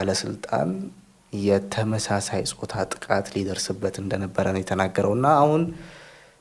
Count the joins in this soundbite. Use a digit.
0